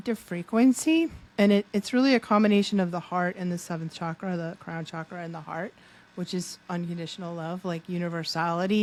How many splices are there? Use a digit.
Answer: 0